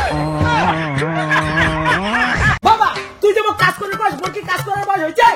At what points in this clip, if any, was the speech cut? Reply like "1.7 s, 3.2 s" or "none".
2.6 s